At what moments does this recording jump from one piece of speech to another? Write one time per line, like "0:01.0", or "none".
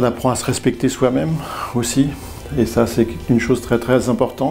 none